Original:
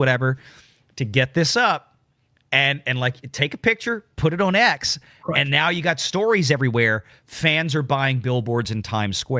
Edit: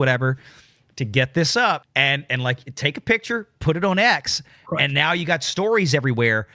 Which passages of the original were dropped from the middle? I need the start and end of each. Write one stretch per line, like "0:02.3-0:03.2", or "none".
0:01.9-0:02.4